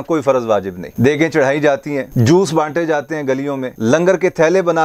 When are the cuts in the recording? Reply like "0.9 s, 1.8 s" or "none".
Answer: 2.0 s